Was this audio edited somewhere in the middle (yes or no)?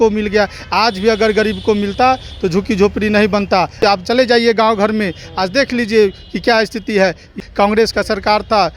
yes